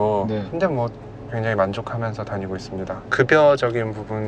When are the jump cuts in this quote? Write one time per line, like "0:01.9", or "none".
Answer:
0:01.3
0:03.0